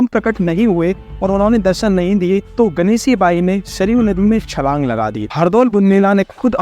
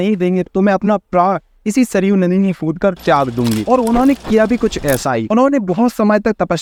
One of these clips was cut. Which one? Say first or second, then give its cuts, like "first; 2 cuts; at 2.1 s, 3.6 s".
first; 1 cut; at 5.3 s